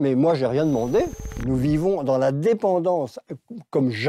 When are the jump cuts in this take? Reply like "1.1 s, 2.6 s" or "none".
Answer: 1.3 s